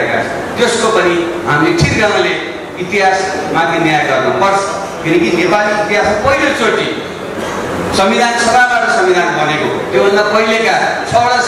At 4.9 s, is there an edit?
no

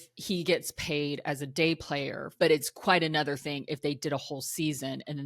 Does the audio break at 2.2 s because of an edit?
yes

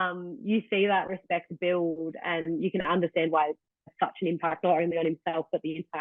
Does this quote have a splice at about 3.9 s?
yes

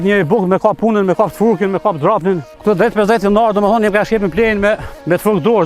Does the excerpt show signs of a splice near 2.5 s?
yes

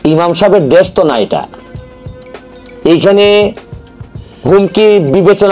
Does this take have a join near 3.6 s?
no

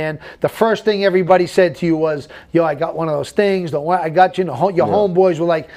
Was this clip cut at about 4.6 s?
no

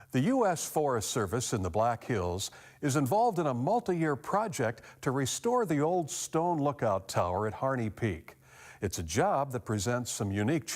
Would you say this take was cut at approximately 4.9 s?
no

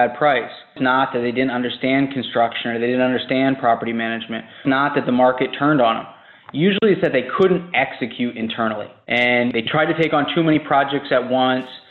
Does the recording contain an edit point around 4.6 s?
yes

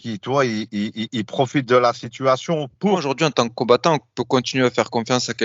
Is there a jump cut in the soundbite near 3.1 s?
yes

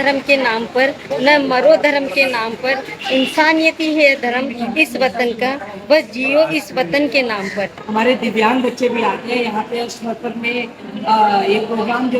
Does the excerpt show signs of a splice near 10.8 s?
no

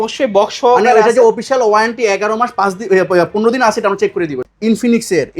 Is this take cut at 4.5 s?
yes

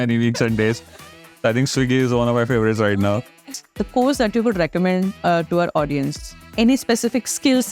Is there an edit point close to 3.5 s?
yes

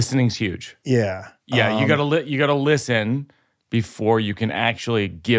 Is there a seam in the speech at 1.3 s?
yes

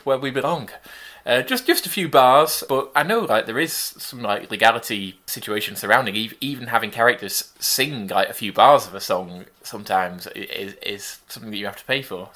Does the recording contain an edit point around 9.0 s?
no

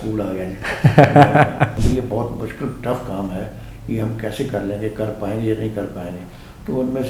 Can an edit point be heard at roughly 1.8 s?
yes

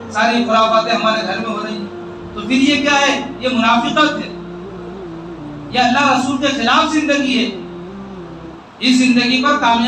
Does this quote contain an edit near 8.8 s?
no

